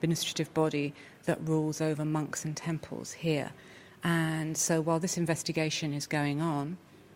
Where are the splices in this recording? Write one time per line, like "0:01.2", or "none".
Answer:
none